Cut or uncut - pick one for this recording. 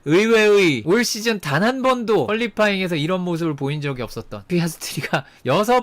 cut